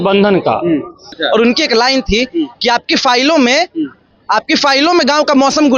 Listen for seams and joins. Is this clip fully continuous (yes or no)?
no